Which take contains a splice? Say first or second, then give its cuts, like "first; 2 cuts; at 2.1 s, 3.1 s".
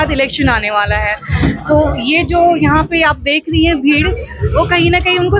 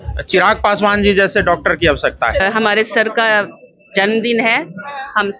second; 1 cut; at 2.4 s